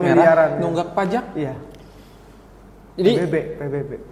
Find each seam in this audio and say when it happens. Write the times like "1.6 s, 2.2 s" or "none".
none